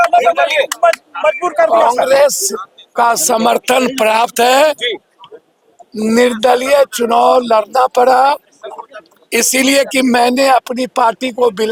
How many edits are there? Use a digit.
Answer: 0